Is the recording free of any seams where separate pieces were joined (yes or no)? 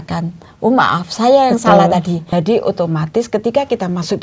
no